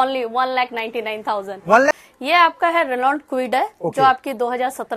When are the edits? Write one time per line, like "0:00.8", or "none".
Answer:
0:01.9